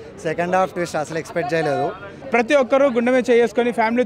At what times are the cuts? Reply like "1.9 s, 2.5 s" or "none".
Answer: 2.1 s